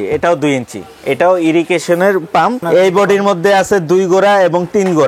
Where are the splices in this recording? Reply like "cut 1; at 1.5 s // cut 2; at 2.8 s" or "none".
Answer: cut 1; at 2.6 s